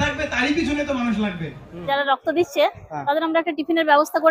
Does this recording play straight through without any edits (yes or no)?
no